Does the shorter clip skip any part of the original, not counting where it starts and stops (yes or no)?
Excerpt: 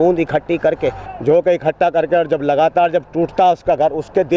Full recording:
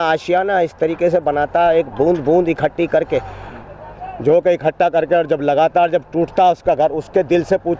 yes